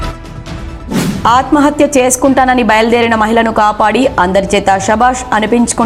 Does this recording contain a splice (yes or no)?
no